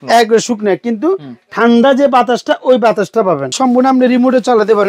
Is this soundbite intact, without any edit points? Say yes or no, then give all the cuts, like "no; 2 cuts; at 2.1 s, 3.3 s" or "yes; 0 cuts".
no; 1 cut; at 3.5 s